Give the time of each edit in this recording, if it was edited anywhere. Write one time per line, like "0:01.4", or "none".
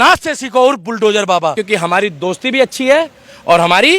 0:01.6

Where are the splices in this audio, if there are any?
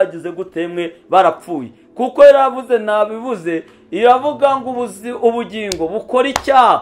none

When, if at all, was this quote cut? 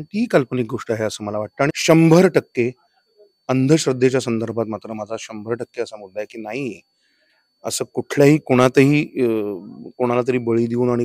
0:01.7

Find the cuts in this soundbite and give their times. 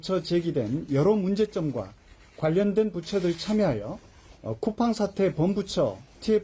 none

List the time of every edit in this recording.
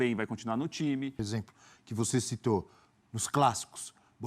0:01.2

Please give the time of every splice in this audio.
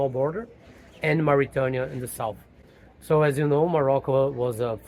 none

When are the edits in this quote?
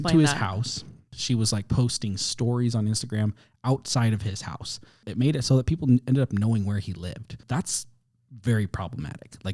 0:01.1
0:05.0
0:07.4

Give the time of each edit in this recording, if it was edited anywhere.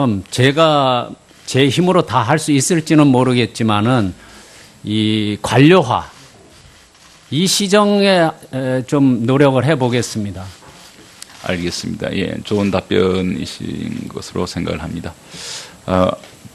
0:07.4

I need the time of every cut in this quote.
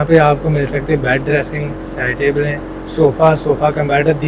none

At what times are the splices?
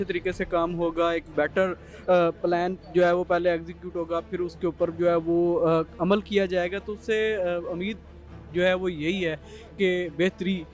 none

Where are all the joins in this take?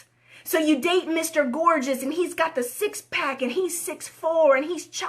none

